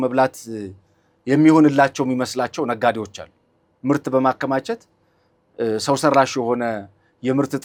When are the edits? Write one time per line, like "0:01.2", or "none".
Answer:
none

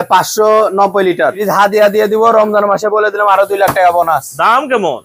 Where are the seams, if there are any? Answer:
0:01.4

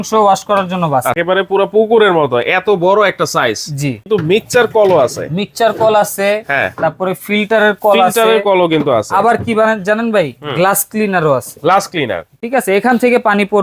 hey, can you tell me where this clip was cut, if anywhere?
0:01.2
0:04.0
0:12.3

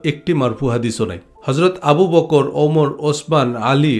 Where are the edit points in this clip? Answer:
0:01.3

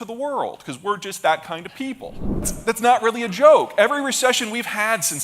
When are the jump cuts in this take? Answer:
0:02.5

